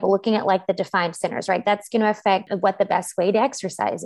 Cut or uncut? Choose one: cut